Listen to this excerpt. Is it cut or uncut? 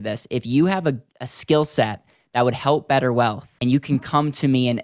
cut